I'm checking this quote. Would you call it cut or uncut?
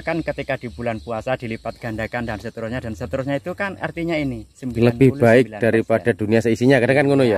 uncut